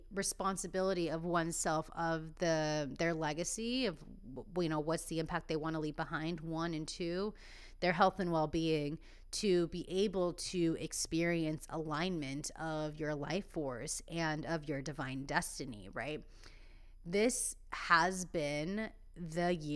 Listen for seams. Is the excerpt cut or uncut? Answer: uncut